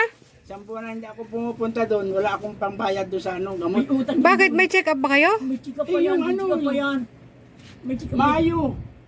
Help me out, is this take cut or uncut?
uncut